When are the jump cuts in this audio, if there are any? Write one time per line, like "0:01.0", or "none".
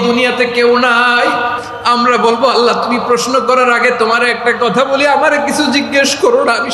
0:01.7

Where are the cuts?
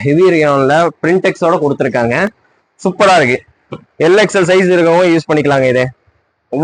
none

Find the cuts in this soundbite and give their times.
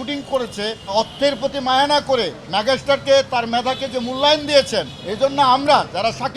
0:00.8
0:05.0

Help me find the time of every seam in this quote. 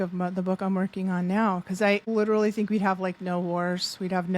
0:02.0

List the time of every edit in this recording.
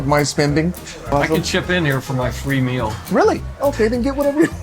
0:01.1

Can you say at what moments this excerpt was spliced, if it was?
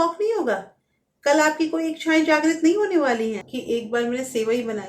0:03.5

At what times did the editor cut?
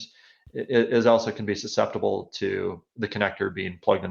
none

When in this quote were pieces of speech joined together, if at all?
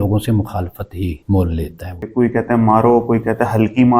0:01.2
0:02.1

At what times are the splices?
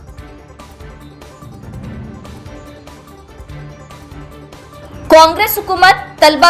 0:01.4

